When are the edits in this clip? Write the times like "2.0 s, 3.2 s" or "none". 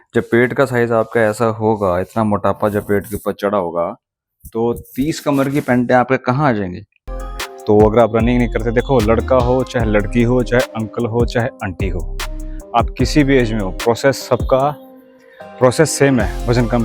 7.0 s